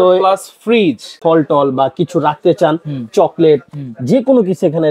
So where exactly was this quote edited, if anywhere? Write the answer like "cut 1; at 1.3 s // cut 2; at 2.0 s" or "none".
cut 1; at 1.1 s